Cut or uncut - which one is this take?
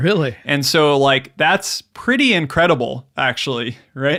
uncut